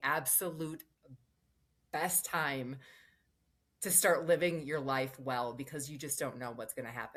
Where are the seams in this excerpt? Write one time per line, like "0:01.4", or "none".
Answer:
none